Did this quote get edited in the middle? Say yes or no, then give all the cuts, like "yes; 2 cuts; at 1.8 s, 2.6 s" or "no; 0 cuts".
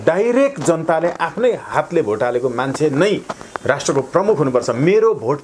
no; 0 cuts